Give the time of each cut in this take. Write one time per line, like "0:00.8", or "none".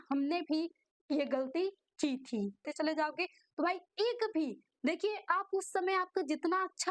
0:02.7

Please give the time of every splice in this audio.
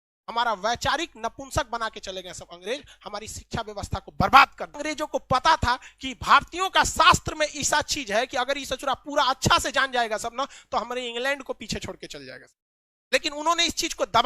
0:04.8

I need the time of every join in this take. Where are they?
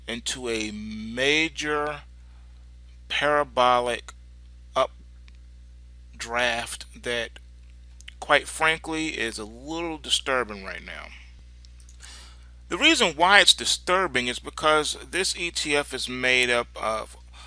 0:03.9

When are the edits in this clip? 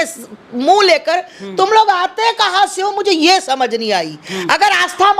none

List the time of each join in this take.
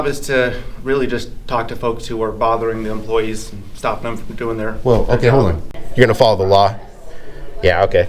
0:05.8

